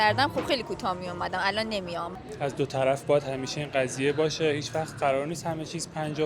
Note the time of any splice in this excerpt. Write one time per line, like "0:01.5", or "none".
0:02.1